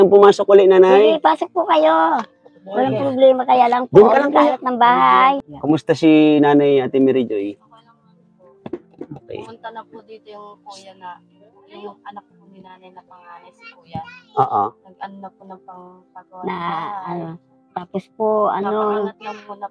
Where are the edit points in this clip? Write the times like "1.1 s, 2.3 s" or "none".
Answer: 5.5 s